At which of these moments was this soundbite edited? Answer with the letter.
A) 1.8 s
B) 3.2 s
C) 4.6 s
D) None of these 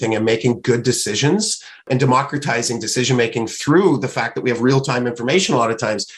D